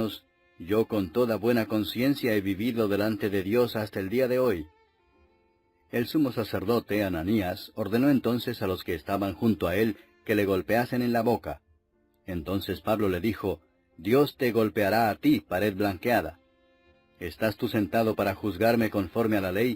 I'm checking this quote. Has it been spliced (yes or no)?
yes